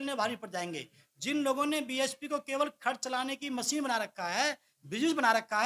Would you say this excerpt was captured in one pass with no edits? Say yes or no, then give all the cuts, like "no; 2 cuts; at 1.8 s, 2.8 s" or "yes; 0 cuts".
yes; 0 cuts